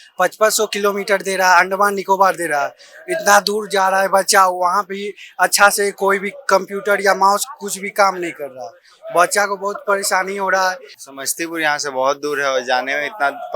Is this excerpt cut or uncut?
cut